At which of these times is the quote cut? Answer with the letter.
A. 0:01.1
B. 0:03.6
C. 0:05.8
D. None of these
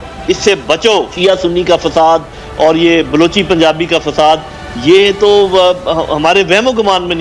A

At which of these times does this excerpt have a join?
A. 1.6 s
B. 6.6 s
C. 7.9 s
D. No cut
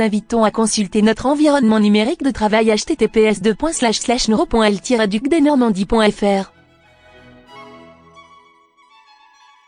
B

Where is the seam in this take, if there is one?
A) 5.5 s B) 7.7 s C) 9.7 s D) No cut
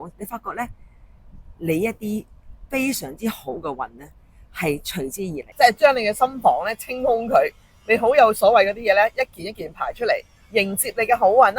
A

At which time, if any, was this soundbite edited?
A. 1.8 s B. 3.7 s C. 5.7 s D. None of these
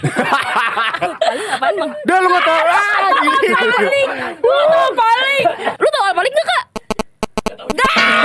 C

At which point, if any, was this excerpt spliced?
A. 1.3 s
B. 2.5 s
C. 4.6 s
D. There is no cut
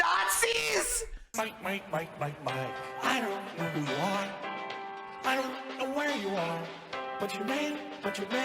A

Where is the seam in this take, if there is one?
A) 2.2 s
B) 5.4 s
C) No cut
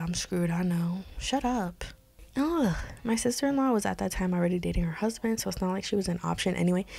A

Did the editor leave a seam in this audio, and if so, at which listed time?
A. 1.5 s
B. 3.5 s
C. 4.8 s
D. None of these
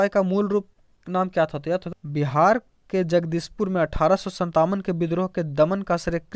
A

